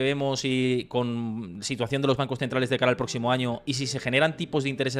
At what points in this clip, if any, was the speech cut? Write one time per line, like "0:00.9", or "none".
none